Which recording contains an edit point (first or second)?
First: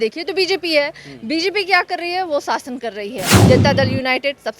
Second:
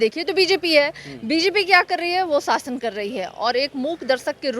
first